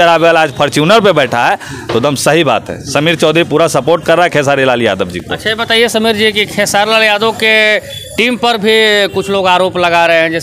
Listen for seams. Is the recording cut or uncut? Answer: uncut